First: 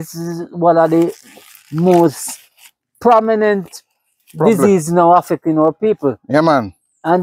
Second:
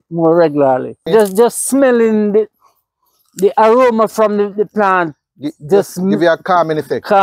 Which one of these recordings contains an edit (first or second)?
second